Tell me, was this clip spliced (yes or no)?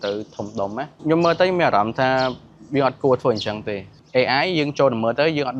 yes